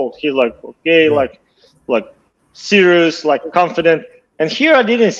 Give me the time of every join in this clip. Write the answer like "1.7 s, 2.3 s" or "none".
none